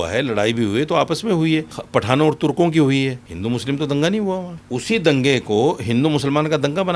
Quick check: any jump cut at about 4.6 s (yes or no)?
yes